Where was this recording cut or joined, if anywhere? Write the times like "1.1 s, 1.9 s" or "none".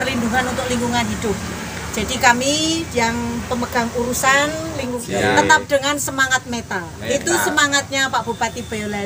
5.0 s